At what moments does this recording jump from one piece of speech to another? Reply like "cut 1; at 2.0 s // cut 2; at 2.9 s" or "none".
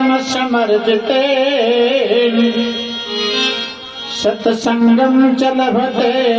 none